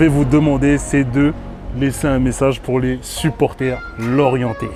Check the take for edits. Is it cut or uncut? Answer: uncut